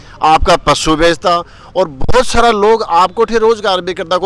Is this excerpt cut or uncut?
uncut